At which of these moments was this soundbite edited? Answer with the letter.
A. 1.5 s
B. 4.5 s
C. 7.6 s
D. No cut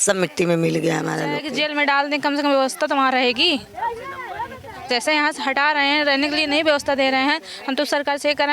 A